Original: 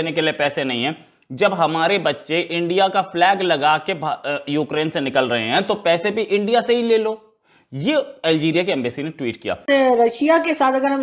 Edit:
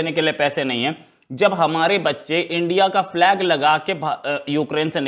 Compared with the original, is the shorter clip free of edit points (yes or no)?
yes